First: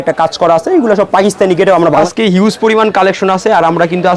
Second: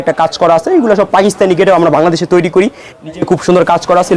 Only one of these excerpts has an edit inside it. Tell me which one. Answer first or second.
first